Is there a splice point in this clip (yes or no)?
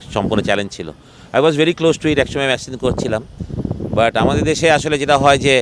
no